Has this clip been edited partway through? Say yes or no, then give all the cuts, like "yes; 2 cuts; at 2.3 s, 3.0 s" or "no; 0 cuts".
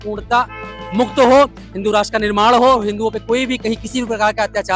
no; 0 cuts